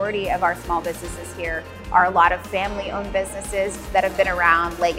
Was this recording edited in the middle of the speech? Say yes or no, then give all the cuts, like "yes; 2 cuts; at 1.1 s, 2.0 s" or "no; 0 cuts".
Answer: no; 0 cuts